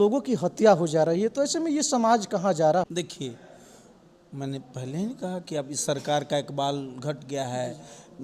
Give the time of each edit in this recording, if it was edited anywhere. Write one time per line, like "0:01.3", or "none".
0:02.9